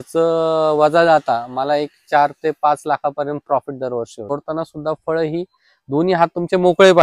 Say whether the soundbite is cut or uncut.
cut